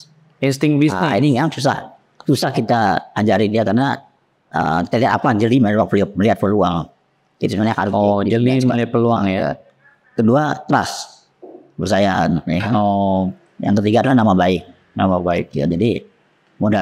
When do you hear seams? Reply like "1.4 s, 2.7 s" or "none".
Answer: none